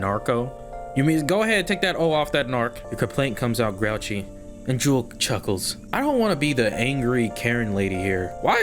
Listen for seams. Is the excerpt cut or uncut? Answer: cut